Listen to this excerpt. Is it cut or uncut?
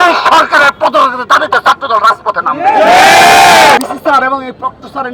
cut